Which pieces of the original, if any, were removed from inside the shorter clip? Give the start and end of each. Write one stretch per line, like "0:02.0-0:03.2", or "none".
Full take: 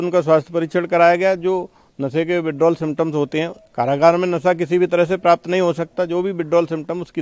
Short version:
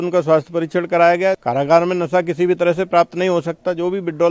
0:01.4-0:03.7